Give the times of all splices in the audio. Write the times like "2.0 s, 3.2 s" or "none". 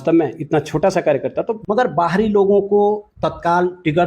1.6 s